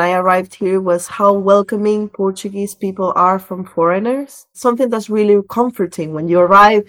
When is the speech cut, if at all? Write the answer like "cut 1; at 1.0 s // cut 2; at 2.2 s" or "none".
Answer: cut 1; at 4.6 s